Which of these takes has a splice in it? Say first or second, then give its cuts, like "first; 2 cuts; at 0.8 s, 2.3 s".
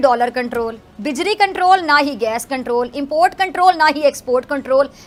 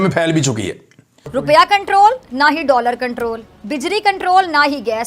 second; 1 cut; at 1.3 s